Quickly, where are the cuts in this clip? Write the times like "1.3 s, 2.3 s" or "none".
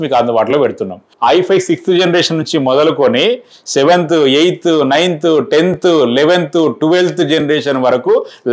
1.1 s